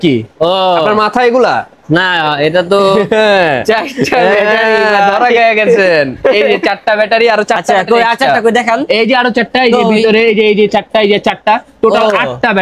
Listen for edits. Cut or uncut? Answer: uncut